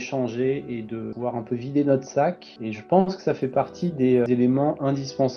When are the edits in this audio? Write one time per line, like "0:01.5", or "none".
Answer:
0:01.1
0:04.3

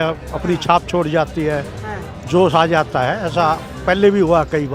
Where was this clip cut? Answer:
none

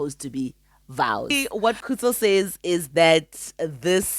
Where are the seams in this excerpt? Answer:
0:01.4

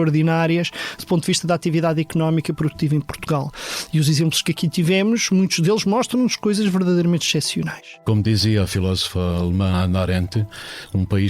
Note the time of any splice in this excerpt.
0:08.1

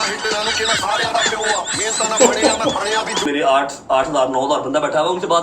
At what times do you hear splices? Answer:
0:03.2

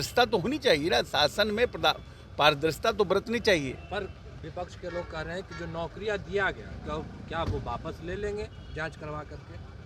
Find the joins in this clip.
none

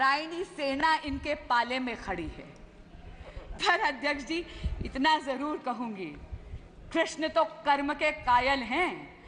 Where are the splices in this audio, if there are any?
none

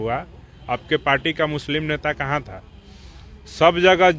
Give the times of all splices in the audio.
none

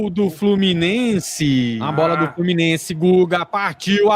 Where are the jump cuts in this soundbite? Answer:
0:01.8

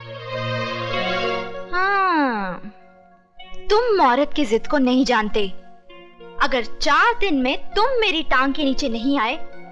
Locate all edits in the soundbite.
none

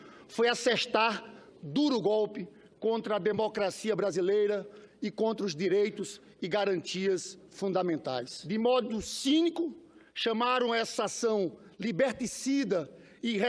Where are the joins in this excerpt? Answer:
0:03.2

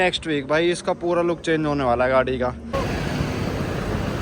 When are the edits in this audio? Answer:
0:02.6

